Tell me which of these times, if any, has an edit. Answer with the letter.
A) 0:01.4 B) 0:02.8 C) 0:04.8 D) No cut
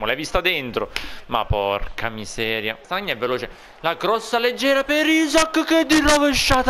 B